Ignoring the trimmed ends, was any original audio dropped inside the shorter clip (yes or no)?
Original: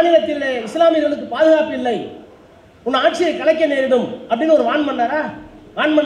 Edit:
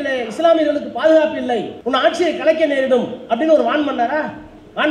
yes